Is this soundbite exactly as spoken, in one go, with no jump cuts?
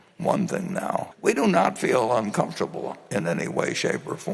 no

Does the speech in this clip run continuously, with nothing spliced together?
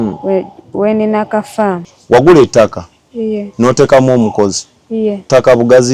no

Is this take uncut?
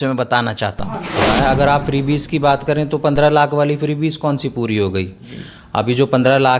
no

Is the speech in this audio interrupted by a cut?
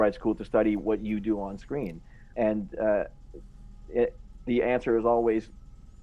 no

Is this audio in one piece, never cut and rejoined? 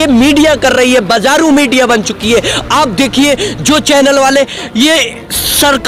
yes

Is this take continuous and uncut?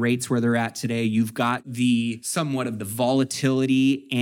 no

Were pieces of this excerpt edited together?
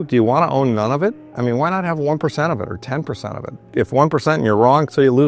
yes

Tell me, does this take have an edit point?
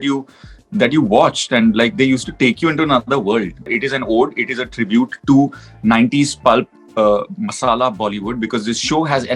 yes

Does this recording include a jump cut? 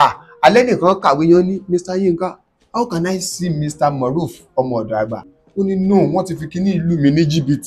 yes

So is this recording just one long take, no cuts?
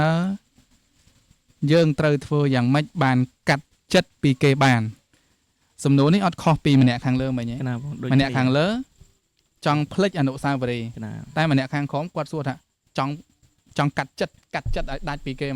yes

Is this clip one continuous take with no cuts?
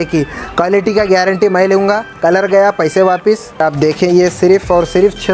no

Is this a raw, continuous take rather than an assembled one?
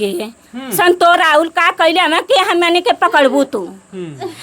no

